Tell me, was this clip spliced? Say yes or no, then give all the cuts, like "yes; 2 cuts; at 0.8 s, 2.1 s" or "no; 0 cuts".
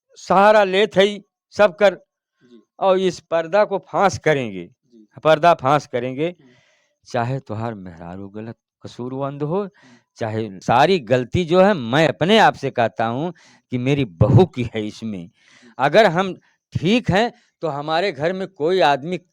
yes; 1 cut; at 10.6 s